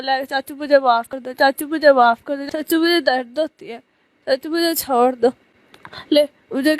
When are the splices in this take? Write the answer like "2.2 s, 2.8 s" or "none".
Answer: 1.2 s, 2.3 s